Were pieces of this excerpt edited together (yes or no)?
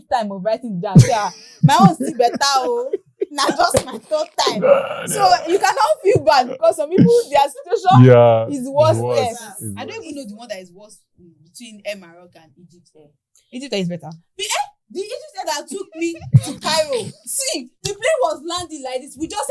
yes